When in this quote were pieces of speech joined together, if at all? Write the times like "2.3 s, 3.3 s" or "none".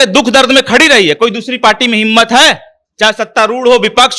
none